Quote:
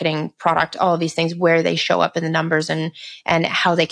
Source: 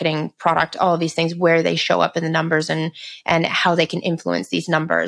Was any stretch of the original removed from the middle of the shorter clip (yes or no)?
no